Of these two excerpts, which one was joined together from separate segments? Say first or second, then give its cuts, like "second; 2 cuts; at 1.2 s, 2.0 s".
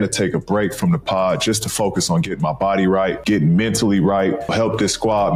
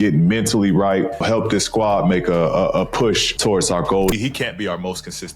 second; 1 cut; at 4.1 s